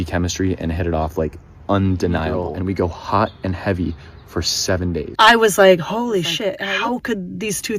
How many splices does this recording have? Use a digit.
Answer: 3